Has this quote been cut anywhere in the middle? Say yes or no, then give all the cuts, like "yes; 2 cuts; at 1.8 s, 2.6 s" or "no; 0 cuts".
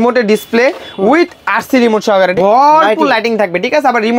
yes; 1 cut; at 2.3 s